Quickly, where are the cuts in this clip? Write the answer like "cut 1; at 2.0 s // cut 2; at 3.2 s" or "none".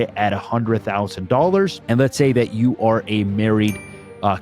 cut 1; at 1.8 s